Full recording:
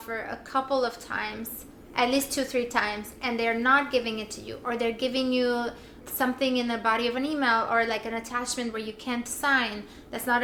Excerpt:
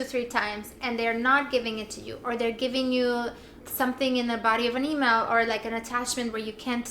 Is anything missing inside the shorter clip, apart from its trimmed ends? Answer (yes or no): no